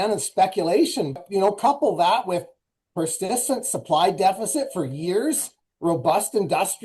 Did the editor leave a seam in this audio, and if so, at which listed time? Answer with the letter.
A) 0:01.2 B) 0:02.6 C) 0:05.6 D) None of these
A